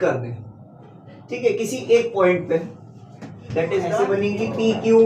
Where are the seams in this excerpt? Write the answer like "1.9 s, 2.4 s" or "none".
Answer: 4.1 s